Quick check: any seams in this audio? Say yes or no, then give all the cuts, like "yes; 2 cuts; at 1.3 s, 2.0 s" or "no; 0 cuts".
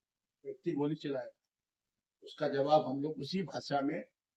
no; 0 cuts